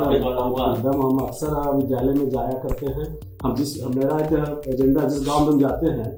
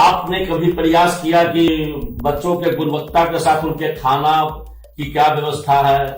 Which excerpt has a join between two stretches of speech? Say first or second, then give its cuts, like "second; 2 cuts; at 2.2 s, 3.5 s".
second; 1 cut; at 1.7 s